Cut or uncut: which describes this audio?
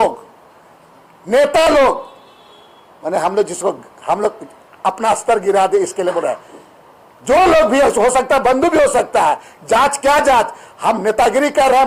uncut